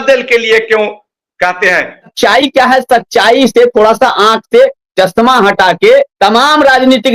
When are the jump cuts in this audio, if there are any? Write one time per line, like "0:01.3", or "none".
0:02.1
0:06.1